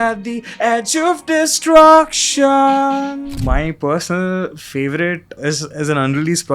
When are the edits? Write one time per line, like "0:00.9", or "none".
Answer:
0:03.3
0:05.4